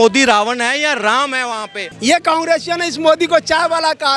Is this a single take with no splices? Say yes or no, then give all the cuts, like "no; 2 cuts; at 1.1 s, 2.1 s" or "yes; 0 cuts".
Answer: no; 1 cut; at 1.8 s